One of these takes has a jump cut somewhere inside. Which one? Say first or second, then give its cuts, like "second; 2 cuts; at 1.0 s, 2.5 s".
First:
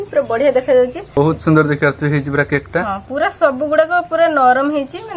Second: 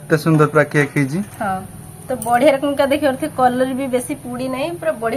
first; 1 cut; at 1.2 s